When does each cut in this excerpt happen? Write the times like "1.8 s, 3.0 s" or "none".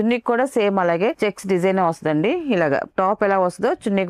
1.2 s